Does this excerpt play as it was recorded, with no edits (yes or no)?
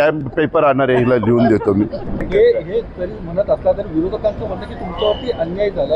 no